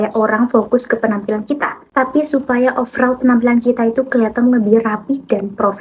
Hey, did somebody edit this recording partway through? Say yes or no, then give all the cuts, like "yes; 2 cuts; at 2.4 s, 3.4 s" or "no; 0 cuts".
no; 0 cuts